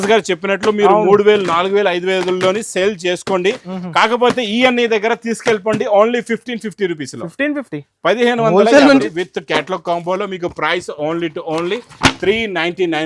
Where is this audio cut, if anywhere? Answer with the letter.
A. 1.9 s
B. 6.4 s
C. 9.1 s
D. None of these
C